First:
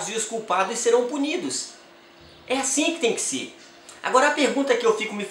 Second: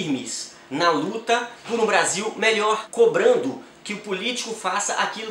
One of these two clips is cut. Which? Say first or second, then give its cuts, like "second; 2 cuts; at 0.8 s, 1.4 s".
second; 2 cuts; at 1.6 s, 2.9 s